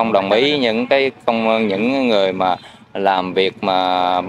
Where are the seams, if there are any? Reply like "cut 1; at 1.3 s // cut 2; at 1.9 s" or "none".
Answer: none